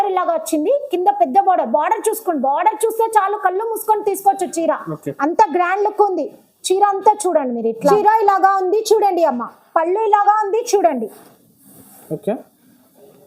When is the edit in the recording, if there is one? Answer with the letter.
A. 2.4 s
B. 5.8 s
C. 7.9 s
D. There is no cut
C